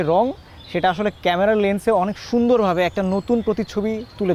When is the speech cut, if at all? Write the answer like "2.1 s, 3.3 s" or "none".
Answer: none

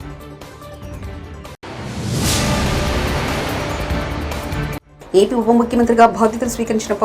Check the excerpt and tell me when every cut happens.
0.8 s, 1.6 s, 4.9 s

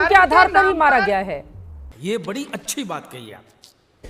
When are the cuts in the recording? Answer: none

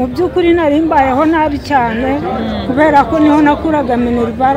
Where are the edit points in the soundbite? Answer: none

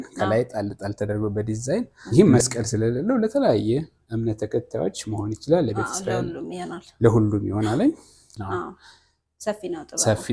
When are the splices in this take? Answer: 2.0 s, 8.3 s

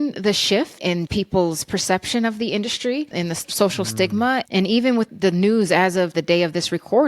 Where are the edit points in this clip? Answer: 1.0 s, 3.1 s, 6.1 s

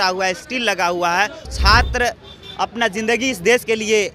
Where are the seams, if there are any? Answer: 1.4 s

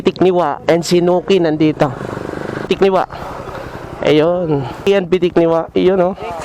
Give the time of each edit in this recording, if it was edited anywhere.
2.6 s, 4.9 s

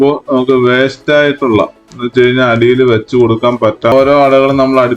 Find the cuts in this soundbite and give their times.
3.9 s

